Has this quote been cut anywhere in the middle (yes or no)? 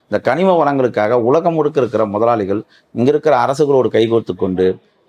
no